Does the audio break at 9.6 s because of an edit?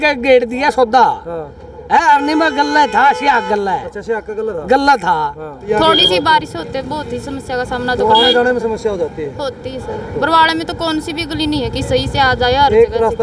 no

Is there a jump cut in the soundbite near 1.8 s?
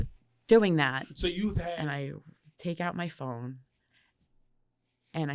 yes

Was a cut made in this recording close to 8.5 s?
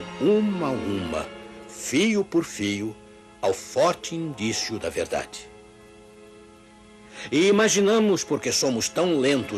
no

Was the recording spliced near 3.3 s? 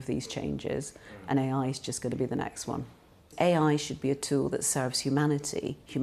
yes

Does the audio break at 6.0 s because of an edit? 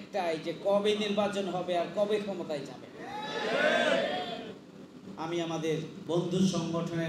yes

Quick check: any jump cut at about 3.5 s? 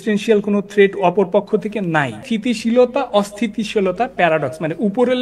no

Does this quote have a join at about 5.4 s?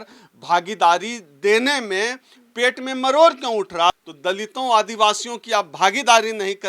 no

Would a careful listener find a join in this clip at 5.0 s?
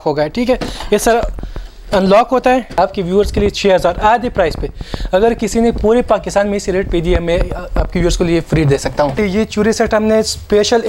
no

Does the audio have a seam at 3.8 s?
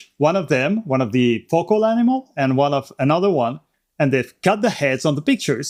no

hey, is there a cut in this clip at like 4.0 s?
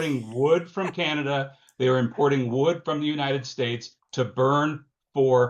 no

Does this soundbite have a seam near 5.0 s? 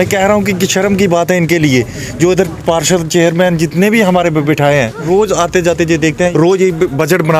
yes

